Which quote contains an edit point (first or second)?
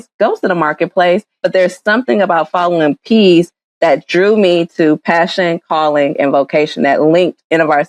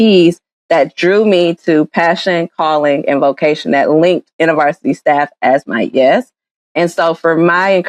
first